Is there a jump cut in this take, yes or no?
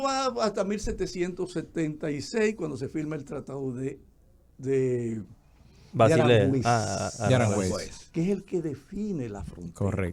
no